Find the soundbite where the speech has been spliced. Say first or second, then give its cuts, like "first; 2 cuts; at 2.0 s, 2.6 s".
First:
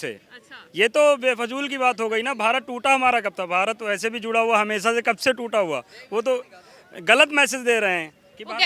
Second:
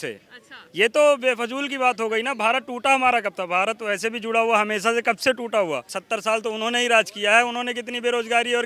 second; 1 cut; at 5.9 s